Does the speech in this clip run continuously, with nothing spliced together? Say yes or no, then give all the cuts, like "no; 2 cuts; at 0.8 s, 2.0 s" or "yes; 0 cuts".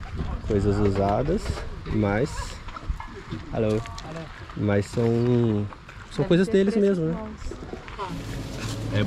no; 1 cut; at 8.1 s